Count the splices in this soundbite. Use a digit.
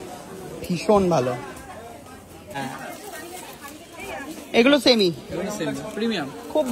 1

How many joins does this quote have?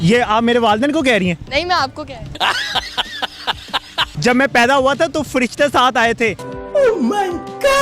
1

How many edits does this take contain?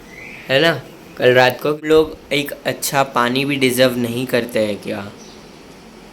1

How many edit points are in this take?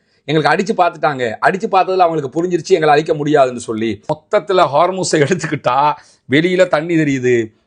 1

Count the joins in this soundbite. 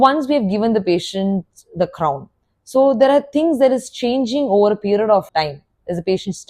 1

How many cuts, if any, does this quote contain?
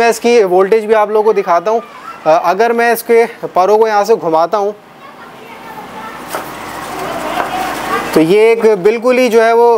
0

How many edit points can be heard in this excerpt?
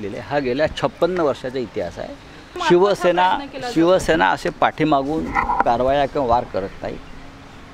1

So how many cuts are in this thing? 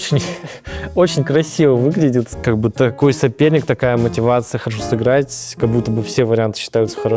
1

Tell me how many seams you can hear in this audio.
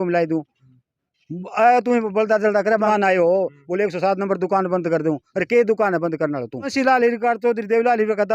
2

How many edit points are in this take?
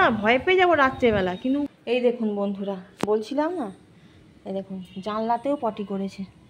1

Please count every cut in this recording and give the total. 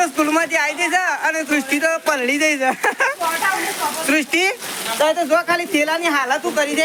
0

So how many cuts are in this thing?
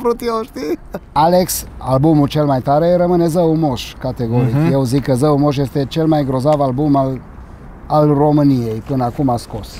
1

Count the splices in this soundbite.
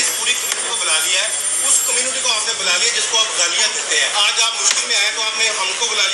1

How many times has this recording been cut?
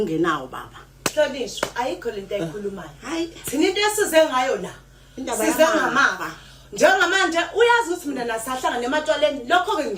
1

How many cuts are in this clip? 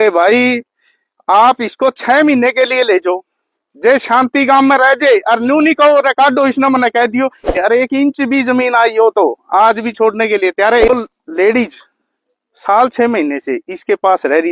2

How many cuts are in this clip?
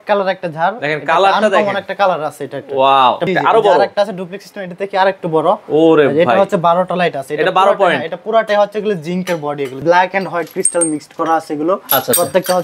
2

